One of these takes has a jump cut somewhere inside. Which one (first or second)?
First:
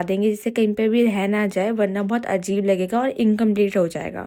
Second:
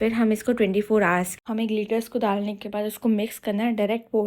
second